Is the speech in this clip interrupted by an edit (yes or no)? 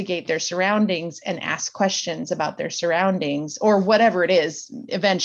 no